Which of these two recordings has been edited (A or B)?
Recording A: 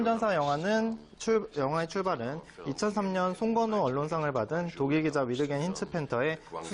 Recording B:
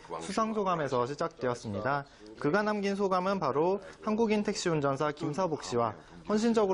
B